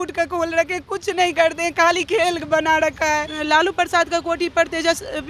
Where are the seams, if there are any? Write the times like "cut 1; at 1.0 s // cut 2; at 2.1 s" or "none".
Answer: cut 1; at 3.3 s